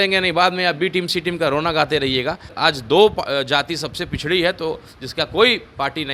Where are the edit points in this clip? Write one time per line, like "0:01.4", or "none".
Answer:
0:02.5